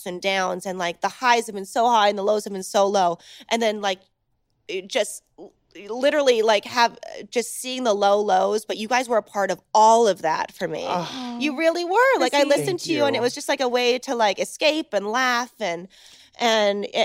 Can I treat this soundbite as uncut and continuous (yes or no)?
yes